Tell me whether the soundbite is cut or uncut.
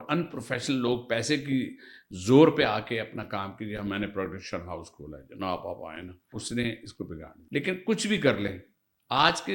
cut